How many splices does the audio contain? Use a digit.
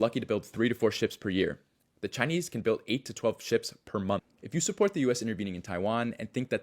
1